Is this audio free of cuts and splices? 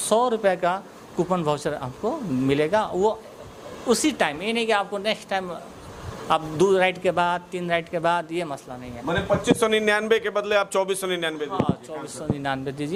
yes; 0 cuts

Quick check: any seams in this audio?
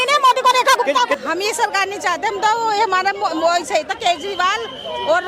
yes; 1 cut; at 1.1 s

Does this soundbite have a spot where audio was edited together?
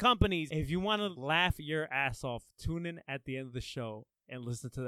yes; 1 cut; at 1.0 s

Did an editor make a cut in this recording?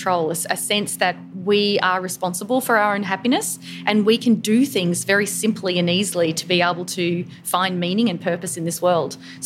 no; 0 cuts

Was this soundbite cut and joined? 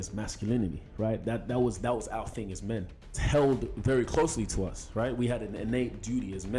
yes; 1 cut; at 3.2 s

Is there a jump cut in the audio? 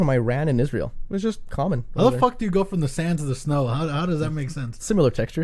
yes; 1 cut; at 1.0 s

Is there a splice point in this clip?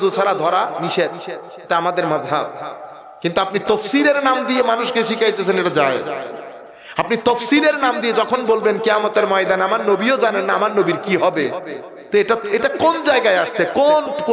no; 0 cuts

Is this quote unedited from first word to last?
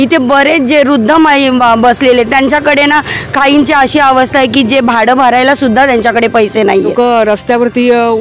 no; 1 cut; at 6.9 s

